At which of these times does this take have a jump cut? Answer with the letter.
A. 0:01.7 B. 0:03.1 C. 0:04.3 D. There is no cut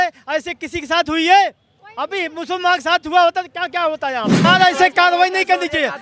C